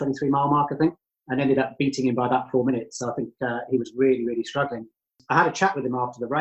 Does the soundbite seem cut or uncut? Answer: cut